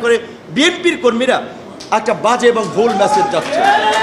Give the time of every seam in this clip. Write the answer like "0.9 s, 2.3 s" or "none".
1.6 s